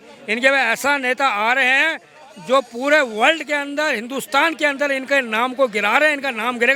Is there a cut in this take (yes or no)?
no